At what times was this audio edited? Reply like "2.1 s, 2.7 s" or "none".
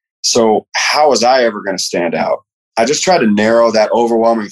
2.6 s